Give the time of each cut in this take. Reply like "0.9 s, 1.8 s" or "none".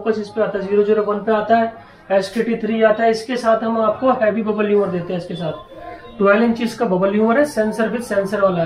none